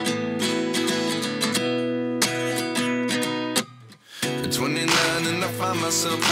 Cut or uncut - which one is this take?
cut